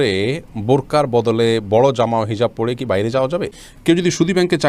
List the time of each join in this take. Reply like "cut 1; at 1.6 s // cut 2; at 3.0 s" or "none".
cut 1; at 3.5 s